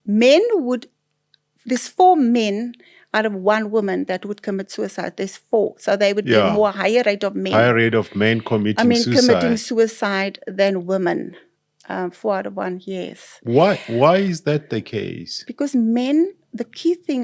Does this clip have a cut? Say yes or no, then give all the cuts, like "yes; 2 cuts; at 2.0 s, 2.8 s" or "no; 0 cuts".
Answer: no; 0 cuts